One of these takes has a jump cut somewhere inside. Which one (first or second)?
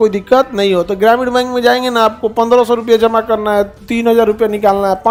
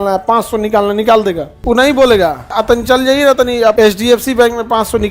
second